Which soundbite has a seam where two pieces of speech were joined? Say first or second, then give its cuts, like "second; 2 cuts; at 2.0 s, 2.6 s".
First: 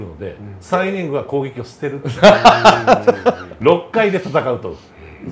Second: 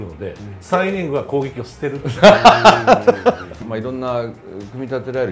second; 1 cut; at 3.5 s